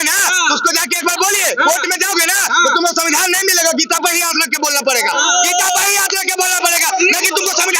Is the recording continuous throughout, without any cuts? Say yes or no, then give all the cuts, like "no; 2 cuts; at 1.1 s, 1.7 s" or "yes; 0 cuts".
yes; 0 cuts